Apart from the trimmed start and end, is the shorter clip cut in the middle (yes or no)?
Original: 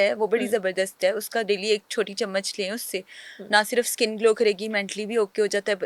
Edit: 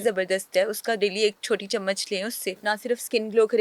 yes